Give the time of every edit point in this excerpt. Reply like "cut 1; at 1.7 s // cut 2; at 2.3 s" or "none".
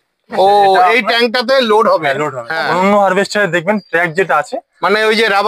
cut 1; at 2.4 s